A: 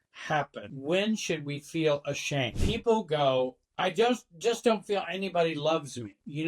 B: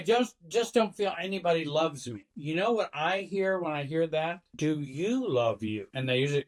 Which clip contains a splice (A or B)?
A